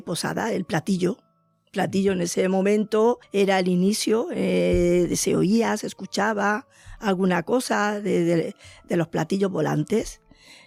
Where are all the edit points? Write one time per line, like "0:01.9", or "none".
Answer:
none